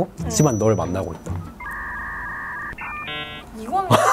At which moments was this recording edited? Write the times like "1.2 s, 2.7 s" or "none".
none